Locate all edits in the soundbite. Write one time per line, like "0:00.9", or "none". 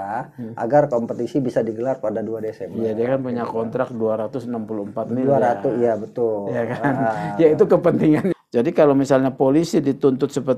0:08.2